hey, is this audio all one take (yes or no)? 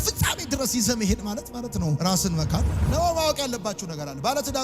no